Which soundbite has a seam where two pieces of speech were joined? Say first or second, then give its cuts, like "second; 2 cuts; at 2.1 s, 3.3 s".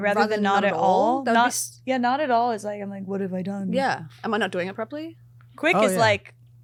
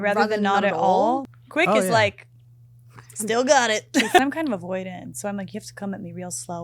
second; 2 cuts; at 1.2 s, 4.2 s